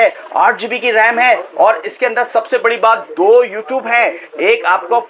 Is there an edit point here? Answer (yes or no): no